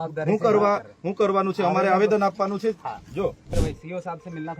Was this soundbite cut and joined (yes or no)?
yes